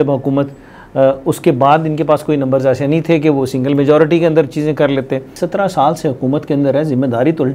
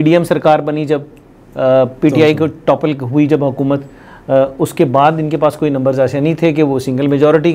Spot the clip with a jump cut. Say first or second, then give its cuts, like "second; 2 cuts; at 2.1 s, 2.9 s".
first; 1 cut; at 5.4 s